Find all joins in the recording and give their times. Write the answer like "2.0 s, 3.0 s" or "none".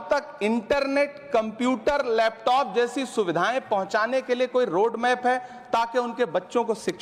none